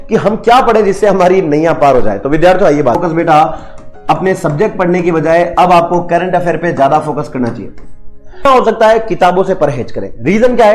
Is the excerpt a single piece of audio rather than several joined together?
no; 2 cuts; at 3.0 s, 8.5 s

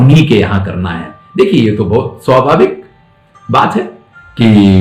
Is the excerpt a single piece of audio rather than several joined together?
yes; 0 cuts

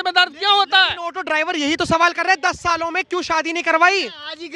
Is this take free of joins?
yes; 0 cuts

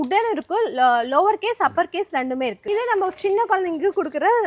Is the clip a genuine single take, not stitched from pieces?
no; 1 cut; at 2.6 s

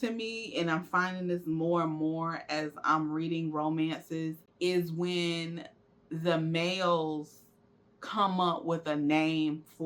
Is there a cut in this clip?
yes; 1 cut; at 4.4 s

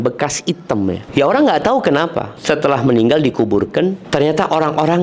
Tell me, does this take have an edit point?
yes; 3 cuts; at 1.0 s, 2.3 s, 4.0 s

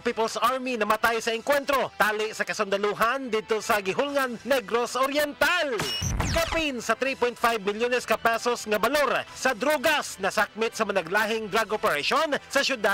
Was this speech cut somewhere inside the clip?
yes; 1 cut; at 6.1 s

